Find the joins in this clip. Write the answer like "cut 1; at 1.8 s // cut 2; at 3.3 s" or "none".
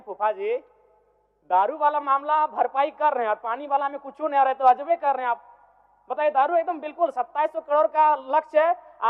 none